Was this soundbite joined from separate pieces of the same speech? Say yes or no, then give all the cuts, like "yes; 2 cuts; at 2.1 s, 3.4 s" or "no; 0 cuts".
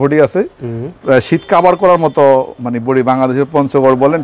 no; 0 cuts